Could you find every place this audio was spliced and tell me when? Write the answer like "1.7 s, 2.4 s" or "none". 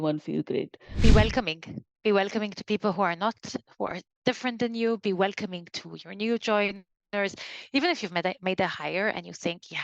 0.9 s